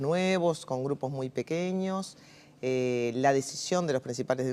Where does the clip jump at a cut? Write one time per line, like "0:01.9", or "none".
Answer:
0:02.0